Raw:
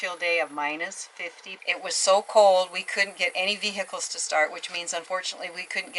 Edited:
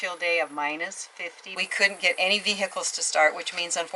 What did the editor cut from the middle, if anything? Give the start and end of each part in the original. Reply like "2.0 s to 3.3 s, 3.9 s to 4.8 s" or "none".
1.6 s to 2.8 s